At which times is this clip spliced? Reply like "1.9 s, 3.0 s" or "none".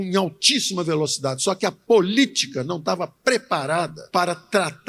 none